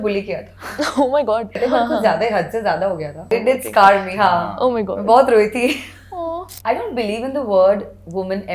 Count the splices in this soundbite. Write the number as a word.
three